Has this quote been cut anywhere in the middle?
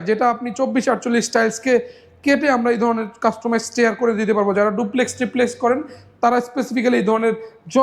no; 0 cuts

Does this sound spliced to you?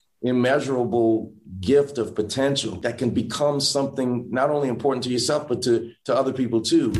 no; 0 cuts

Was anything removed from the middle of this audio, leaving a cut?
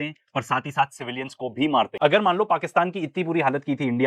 yes; 1 cut; at 1.9 s

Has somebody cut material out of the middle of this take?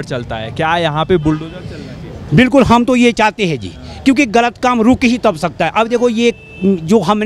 no; 0 cuts

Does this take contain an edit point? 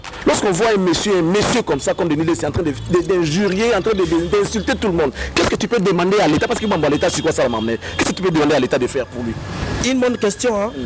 no; 0 cuts

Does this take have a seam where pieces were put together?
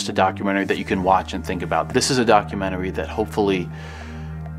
no; 0 cuts

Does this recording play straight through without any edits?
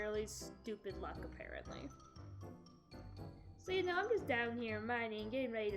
yes; 0 cuts

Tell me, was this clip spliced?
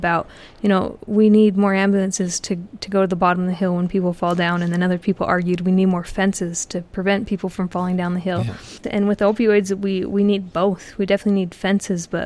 yes; 1 cut; at 8.8 s

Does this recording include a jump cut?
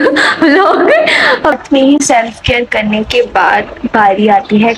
yes; 1 cut; at 1.5 s

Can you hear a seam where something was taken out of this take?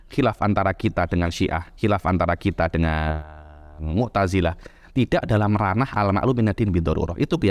no; 0 cuts

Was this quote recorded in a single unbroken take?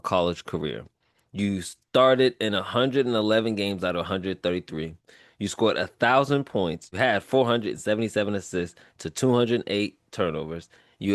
no; 1 cut; at 6.9 s

